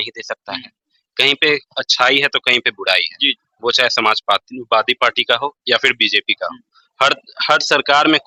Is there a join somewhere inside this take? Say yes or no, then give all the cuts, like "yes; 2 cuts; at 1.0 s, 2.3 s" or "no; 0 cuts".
no; 0 cuts